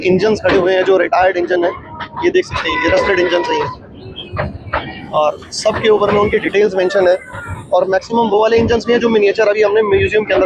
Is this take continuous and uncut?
yes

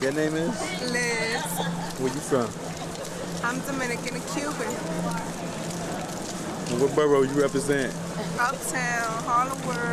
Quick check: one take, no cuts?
yes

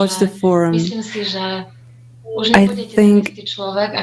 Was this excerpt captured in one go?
yes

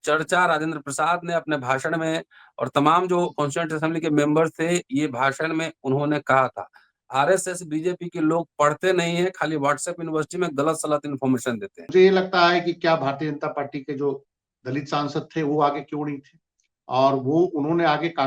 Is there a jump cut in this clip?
yes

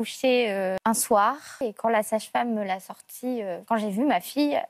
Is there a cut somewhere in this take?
yes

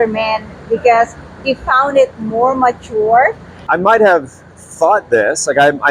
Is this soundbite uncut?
no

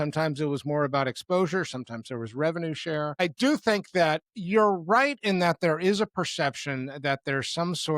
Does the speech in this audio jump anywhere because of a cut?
yes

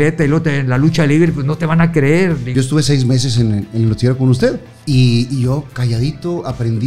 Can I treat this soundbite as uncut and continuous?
no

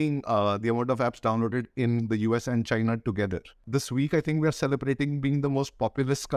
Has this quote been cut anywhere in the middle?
yes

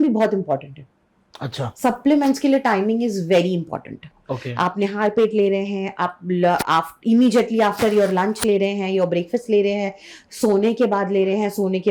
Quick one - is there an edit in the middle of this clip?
no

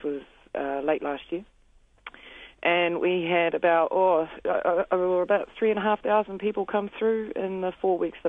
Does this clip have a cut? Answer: no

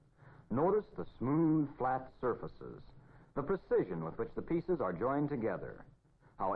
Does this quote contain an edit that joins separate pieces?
no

